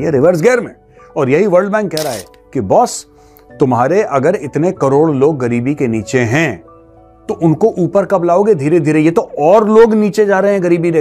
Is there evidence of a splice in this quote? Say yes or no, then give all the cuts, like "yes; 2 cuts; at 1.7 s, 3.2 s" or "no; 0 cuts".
no; 0 cuts